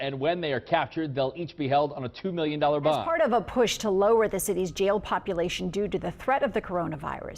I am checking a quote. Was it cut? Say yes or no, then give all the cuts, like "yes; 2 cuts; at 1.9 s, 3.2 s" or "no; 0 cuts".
yes; 1 cut; at 3.1 s